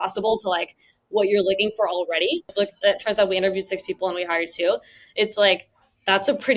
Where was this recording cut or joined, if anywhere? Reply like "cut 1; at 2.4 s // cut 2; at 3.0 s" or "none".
cut 1; at 2.5 s